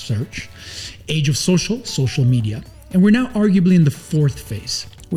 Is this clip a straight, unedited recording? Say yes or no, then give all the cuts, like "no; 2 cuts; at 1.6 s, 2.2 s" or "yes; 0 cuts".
yes; 0 cuts